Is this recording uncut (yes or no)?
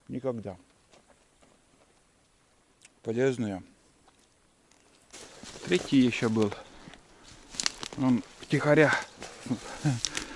no